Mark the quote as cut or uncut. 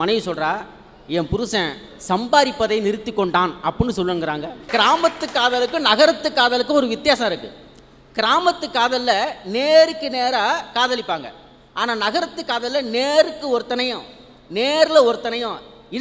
cut